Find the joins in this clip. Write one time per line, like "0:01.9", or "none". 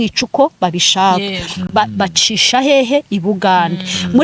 none